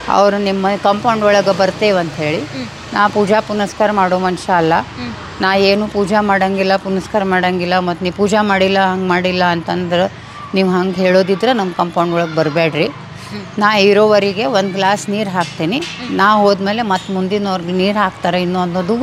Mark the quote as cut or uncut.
uncut